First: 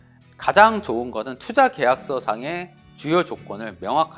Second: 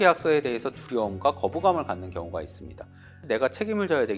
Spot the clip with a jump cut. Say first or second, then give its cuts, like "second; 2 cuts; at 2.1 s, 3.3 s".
second; 1 cut; at 3.2 s